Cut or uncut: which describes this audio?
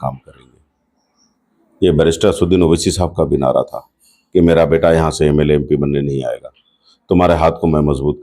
uncut